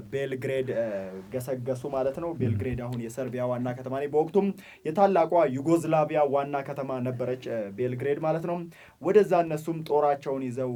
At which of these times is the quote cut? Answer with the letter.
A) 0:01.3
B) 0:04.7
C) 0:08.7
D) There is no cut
D